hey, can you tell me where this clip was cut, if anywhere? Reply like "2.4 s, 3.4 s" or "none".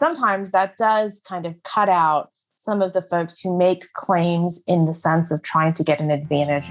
none

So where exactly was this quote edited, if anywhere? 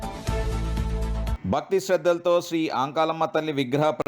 1.4 s

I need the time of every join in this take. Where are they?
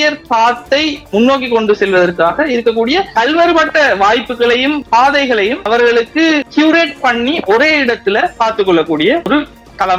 none

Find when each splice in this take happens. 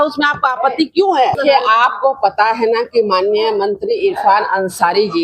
1.4 s

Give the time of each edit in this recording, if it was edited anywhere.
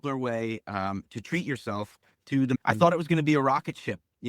2.6 s

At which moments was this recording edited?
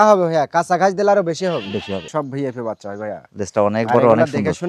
2.1 s

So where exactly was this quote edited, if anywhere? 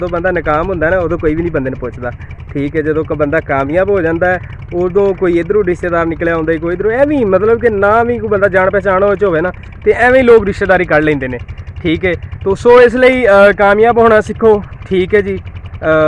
none

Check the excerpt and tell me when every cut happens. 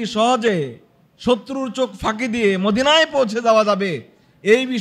none

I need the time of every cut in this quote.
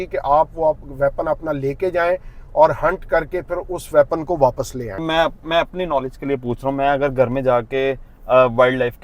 5.1 s

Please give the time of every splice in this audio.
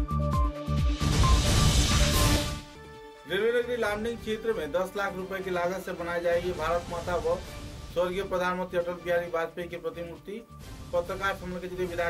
2.3 s

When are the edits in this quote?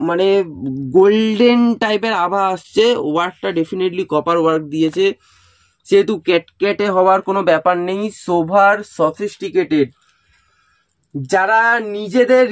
none

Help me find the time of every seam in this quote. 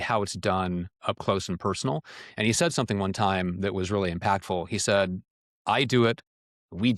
none

